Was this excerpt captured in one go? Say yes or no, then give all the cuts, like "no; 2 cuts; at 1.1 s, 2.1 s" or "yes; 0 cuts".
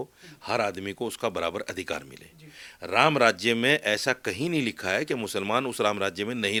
yes; 0 cuts